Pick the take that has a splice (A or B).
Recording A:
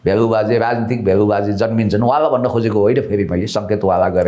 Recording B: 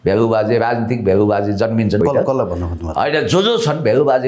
B